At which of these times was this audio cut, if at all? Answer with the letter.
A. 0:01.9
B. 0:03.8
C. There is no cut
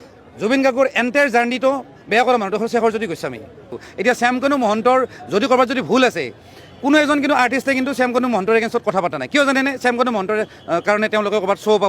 B